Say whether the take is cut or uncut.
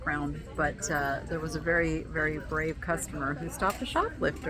uncut